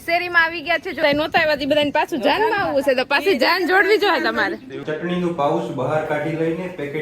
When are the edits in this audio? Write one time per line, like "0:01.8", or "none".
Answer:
0:01.0
0:04.8